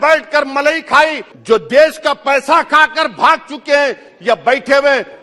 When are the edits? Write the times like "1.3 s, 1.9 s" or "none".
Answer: 1.3 s

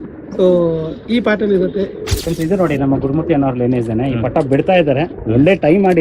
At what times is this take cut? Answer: 2.1 s

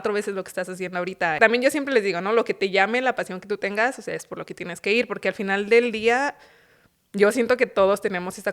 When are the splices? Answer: 1.4 s

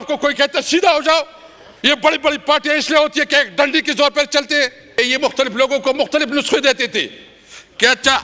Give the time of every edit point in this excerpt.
5.0 s

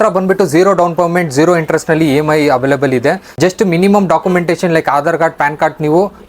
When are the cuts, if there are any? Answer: 3.3 s

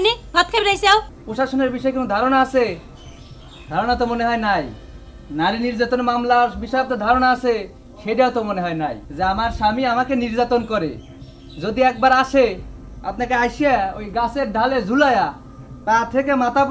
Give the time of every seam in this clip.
1.2 s, 9.0 s

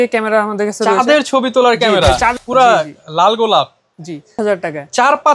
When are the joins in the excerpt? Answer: 2.3 s, 4.4 s

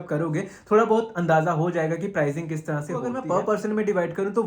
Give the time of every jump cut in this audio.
3.1 s

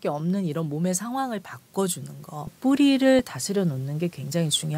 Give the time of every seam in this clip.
none

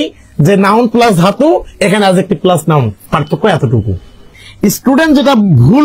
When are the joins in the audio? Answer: 4.3 s

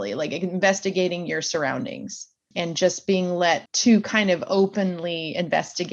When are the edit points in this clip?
2.5 s, 3.7 s

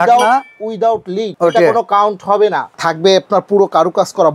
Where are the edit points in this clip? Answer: 1.2 s, 2.6 s

